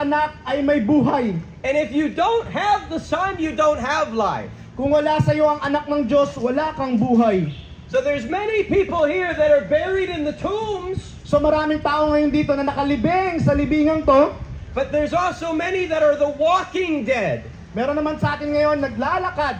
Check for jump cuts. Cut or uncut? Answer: uncut